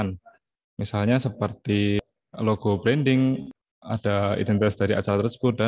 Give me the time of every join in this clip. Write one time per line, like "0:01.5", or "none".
0:02.0
0:03.6

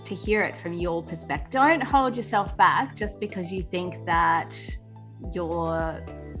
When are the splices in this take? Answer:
0:01.4

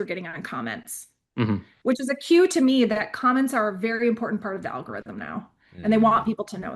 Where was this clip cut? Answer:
none

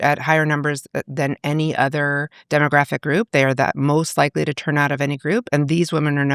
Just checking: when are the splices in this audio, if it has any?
none

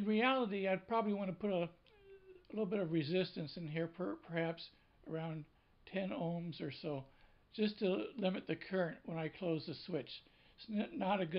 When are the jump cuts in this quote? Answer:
0:03.3

